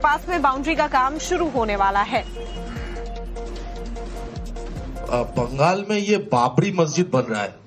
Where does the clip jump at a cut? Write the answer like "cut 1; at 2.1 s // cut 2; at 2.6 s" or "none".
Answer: cut 1; at 2.9 s